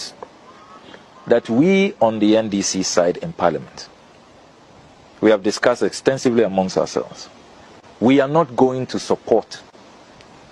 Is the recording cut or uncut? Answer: uncut